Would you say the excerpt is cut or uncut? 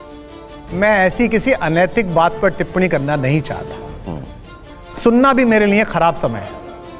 cut